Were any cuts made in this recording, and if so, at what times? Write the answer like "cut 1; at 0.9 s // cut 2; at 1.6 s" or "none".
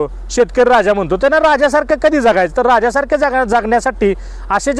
none

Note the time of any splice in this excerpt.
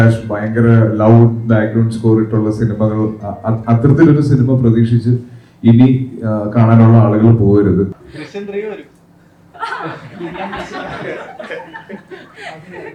cut 1; at 8.0 s

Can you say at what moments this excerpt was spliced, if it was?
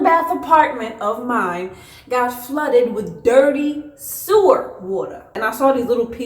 cut 1; at 5.3 s

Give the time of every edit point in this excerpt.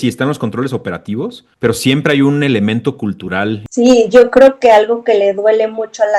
cut 1; at 3.6 s

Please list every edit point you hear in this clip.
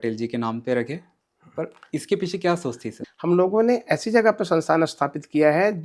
cut 1; at 2.9 s

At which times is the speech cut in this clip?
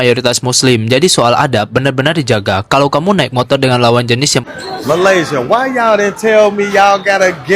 cut 1; at 4.4 s

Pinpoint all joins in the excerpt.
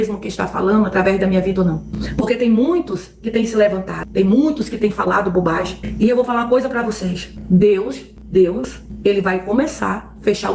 cut 1; at 2.0 s // cut 2; at 7.3 s

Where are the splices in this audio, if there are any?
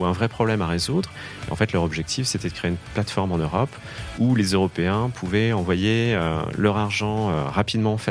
none

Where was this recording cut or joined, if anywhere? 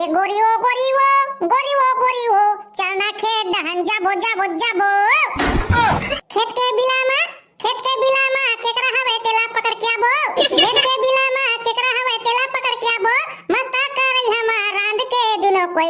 none

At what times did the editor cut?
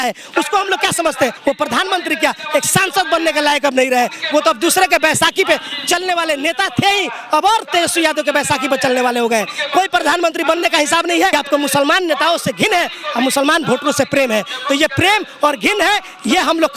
cut 1; at 1.4 s // cut 2; at 11.3 s

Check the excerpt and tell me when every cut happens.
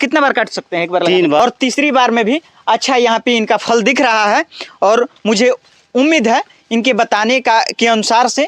cut 1; at 1.4 s

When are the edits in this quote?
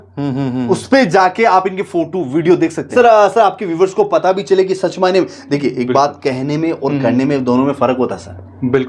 cut 1; at 2.9 s

